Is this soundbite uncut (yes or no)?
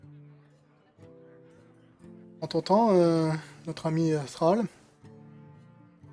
yes